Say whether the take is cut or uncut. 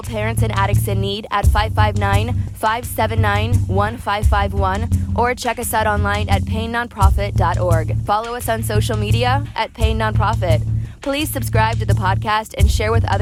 uncut